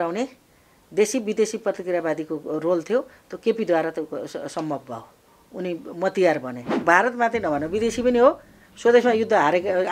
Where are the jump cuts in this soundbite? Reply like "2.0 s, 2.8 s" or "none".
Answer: 6.8 s